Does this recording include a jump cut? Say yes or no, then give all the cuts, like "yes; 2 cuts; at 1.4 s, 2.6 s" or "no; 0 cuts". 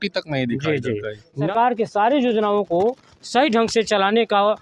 yes; 1 cut; at 1.4 s